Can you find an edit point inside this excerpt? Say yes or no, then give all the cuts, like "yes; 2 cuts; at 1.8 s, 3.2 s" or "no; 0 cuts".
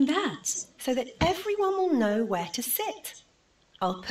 yes; 1 cut; at 1.1 s